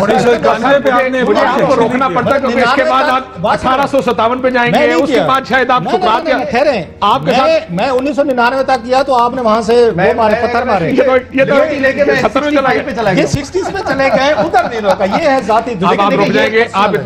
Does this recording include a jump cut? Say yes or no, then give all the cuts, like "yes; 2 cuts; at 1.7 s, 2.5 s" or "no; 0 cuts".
no; 0 cuts